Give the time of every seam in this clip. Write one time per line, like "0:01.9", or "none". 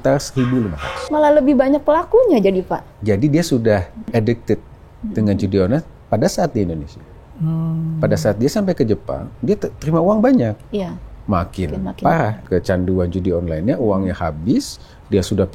0:00.9
0:02.9
0:04.1
0:12.4

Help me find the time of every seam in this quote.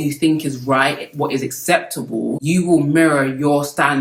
none

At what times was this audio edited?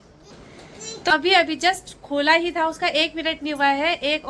0:01.1

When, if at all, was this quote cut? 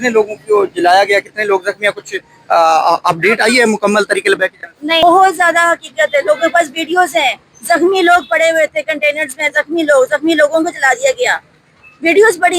0:05.0

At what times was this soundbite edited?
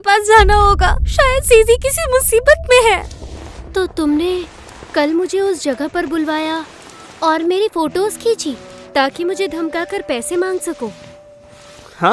none

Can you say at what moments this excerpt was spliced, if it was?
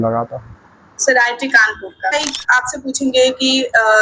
0:02.1

